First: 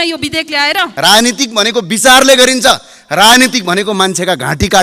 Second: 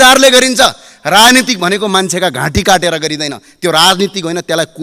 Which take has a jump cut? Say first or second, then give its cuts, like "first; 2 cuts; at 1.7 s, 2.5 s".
first; 1 cut; at 0.9 s